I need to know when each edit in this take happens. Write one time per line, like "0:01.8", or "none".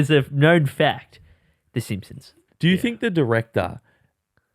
0:02.5